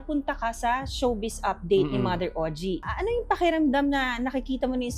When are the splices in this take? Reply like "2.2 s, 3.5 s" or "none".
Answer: 2.8 s